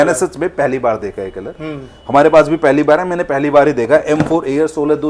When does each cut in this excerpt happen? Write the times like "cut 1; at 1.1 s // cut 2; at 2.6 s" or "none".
none